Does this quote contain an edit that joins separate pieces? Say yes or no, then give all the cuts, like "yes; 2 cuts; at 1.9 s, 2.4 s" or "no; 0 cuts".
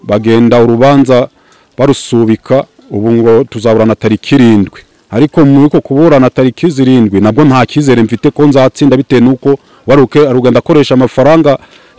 no; 0 cuts